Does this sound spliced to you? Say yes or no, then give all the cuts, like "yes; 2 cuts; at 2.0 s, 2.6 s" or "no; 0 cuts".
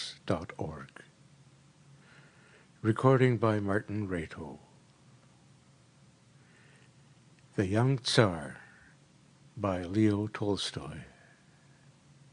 no; 0 cuts